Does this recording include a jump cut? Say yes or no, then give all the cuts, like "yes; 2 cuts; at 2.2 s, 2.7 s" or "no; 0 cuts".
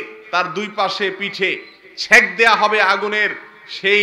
no; 0 cuts